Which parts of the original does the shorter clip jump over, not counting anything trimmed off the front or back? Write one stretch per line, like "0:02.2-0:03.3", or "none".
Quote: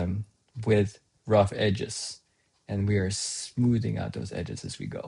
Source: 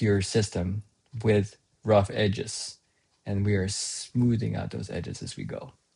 none